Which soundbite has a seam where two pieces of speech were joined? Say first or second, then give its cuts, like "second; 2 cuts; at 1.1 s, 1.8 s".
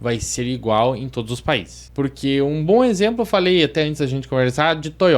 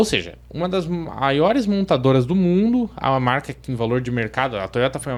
first; 1 cut; at 1.8 s